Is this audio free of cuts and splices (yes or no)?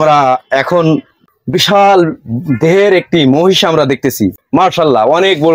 no